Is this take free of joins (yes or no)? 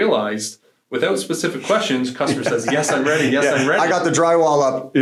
yes